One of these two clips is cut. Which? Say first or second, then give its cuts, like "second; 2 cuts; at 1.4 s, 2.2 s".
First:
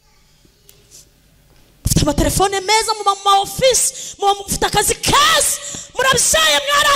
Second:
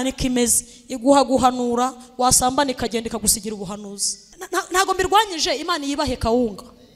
second; 1 cut; at 4.5 s